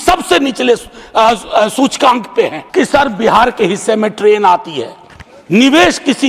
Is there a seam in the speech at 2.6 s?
yes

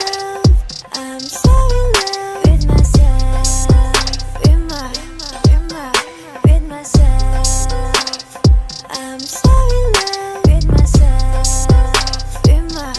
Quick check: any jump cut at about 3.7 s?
no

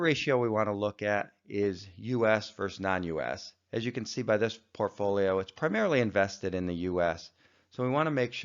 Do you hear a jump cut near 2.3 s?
yes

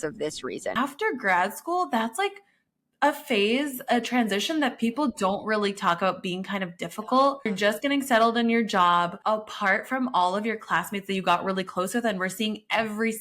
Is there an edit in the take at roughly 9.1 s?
yes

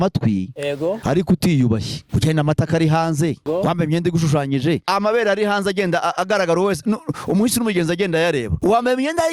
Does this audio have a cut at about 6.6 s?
no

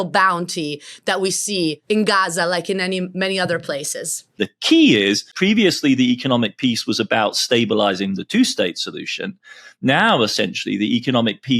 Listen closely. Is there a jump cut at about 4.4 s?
yes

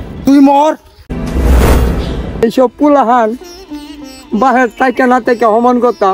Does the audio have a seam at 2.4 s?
yes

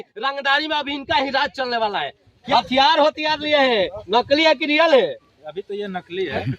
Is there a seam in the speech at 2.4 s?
yes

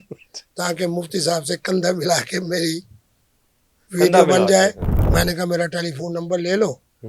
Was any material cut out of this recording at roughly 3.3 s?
no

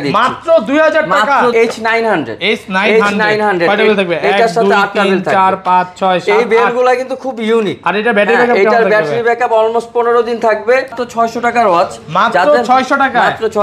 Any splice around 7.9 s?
no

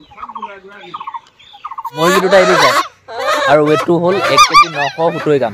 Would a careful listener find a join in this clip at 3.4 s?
no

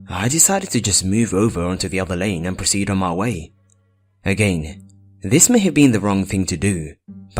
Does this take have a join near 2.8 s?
no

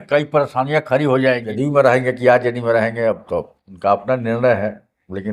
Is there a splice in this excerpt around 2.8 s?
no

